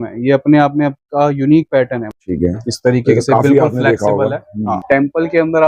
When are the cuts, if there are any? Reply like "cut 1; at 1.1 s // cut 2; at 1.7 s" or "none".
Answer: cut 1; at 2.0 s // cut 2; at 4.8 s